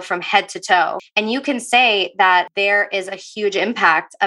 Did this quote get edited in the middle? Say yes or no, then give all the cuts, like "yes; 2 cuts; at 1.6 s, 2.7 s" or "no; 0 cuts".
yes; 2 cuts; at 1.0 s, 2.5 s